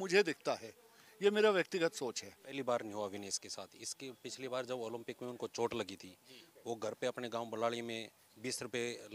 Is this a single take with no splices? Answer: no; 1 cut; at 2.5 s

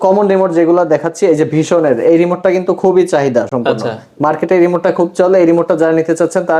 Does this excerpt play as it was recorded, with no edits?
yes; 0 cuts

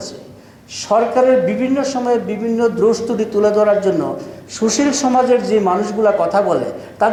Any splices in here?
no; 0 cuts

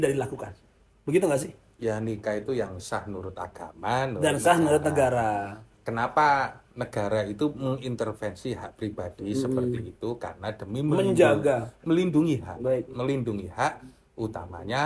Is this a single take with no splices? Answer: yes; 0 cuts

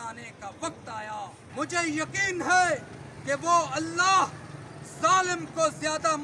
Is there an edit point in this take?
yes; 1 cut; at 1.4 s

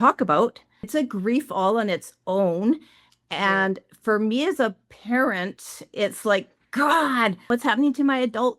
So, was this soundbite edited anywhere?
yes; 2 cuts; at 0.9 s, 7.5 s

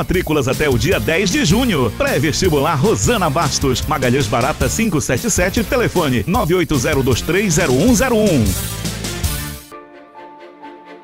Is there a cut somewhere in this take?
yes; 1 cut; at 9.6 s

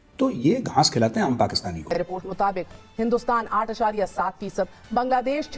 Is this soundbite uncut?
no; 1 cut; at 1.9 s

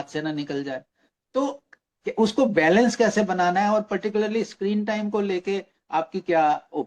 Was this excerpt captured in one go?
yes; 0 cuts

